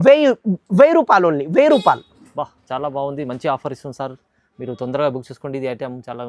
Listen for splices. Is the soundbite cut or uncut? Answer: uncut